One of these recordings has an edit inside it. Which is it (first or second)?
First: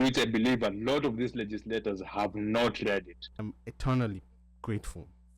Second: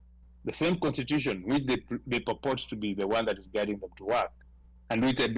first